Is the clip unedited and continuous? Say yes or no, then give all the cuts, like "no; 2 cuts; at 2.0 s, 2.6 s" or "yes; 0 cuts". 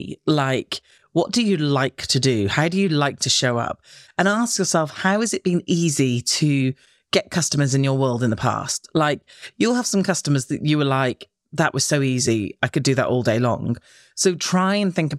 yes; 0 cuts